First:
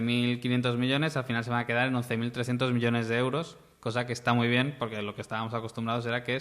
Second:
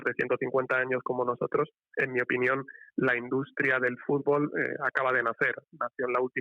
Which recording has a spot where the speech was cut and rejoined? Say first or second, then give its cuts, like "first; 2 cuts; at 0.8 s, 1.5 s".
second; 1 cut; at 1.8 s